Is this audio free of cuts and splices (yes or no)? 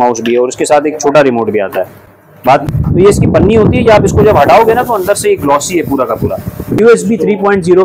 no